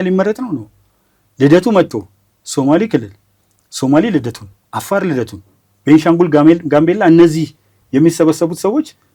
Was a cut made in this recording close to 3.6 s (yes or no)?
no